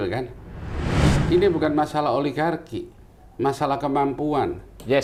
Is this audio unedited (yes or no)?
yes